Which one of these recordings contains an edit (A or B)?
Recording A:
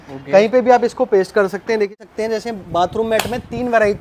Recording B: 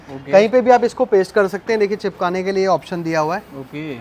A